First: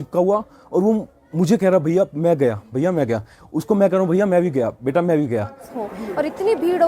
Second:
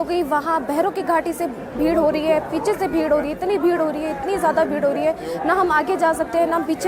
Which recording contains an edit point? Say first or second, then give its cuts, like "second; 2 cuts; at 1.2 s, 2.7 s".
first; 1 cut; at 5.7 s